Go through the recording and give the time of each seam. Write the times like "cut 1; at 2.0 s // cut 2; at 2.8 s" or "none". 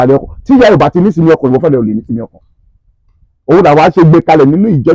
none